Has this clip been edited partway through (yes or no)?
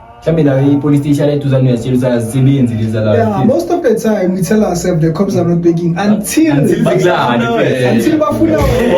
no